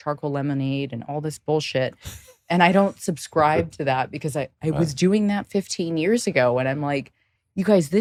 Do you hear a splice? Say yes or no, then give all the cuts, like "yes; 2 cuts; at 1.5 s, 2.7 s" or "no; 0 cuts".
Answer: no; 0 cuts